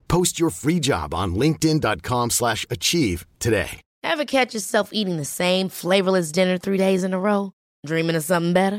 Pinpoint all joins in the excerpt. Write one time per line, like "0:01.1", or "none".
0:03.8